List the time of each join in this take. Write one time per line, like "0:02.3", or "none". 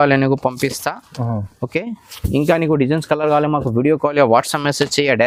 none